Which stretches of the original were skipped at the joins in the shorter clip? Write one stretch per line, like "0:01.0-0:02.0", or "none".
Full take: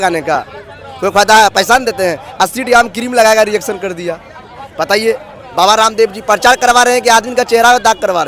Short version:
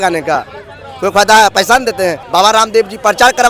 0:02.2-0:05.5